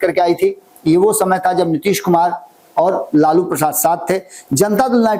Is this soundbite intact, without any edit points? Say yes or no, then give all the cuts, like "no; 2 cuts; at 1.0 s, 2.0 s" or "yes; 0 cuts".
yes; 0 cuts